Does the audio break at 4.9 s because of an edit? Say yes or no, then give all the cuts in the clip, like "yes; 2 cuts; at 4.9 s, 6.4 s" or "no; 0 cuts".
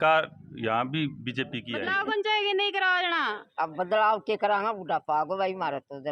no; 1 cut; at 1.8 s